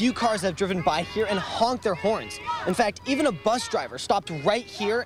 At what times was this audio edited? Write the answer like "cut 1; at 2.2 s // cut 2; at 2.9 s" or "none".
none